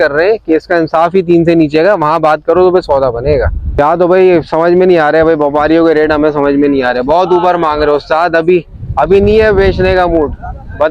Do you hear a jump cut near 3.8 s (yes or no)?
yes